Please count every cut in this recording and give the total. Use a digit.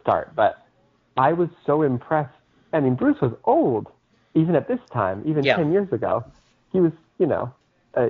0